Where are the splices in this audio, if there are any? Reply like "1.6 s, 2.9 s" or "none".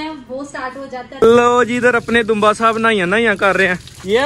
1.1 s